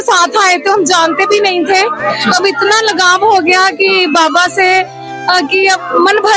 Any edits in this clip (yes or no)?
no